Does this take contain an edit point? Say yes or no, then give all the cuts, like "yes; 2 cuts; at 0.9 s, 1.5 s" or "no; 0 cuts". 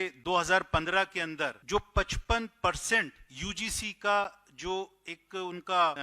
yes; 1 cut; at 1.6 s